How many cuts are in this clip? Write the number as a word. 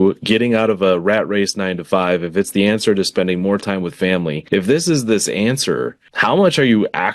two